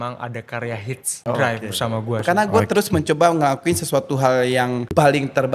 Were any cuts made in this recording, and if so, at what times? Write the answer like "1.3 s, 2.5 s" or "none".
2.2 s

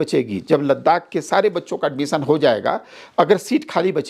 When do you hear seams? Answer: none

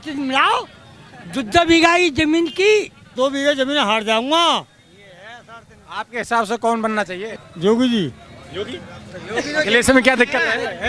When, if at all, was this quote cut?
3.1 s, 7.3 s

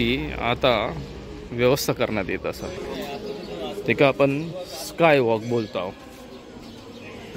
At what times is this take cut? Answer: 2.8 s

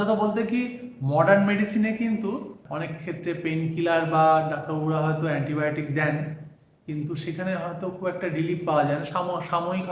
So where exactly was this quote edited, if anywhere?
2.6 s

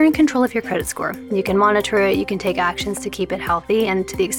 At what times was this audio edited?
none

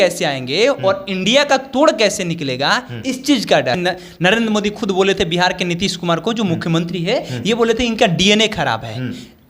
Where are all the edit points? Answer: 3.8 s

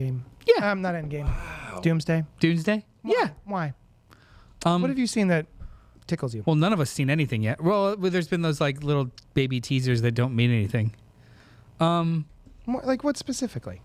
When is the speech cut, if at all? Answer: none

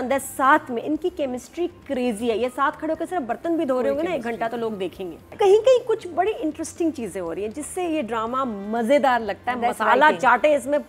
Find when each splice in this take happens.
5.3 s

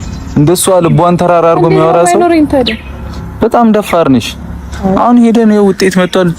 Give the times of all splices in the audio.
none

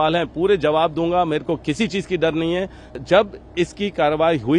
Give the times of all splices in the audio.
3.0 s

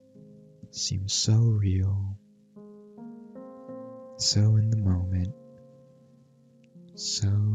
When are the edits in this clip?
none

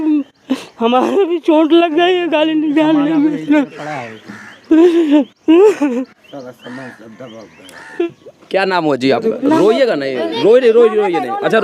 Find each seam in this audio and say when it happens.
8.0 s

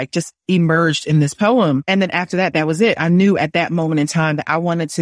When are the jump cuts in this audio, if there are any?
none

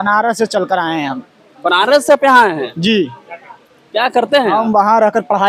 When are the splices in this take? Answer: none

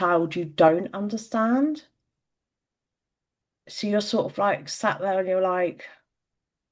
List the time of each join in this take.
none

